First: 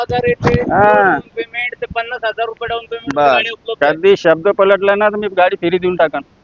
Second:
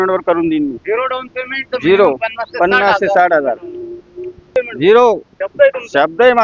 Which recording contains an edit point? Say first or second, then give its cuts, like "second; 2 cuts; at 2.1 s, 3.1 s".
second; 1 cut; at 4.5 s